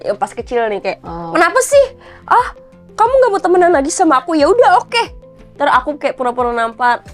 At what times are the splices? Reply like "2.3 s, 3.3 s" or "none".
none